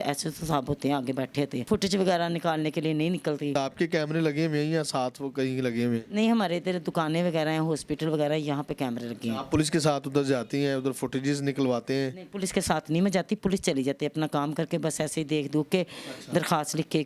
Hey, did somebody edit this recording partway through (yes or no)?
no